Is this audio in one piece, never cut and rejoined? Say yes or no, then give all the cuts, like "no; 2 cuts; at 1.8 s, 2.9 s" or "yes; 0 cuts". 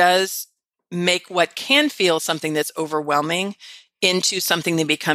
yes; 0 cuts